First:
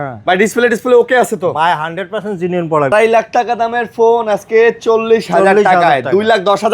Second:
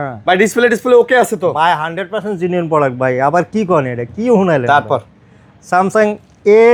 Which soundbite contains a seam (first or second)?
first